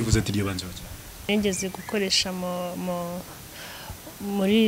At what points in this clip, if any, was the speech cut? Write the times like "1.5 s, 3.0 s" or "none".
1.3 s